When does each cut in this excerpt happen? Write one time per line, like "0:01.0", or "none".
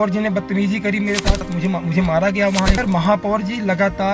0:01.5
0:02.8